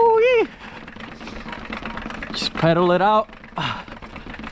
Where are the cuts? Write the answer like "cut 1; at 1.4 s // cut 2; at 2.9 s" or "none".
none